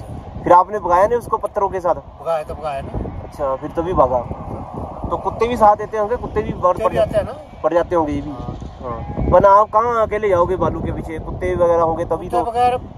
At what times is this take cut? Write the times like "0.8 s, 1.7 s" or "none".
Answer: none